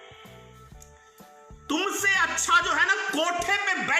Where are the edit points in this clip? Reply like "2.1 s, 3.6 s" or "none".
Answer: none